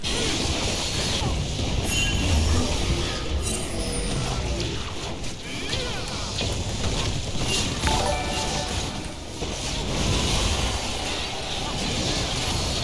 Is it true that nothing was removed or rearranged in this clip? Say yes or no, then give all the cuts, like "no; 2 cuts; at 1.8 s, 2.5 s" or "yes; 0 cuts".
yes; 0 cuts